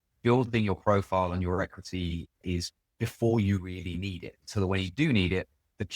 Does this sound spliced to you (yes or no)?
yes